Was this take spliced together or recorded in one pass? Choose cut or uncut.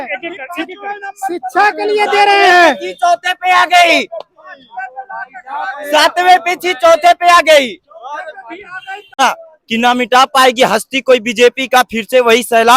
cut